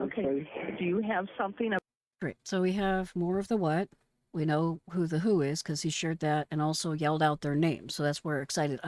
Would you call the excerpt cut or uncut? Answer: uncut